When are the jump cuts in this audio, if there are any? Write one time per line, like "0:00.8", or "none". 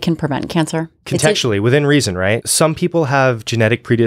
0:01.0
0:02.5